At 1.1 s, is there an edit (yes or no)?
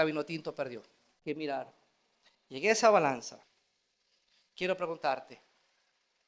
yes